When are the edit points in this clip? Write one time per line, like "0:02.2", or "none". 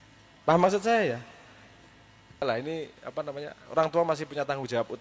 0:02.4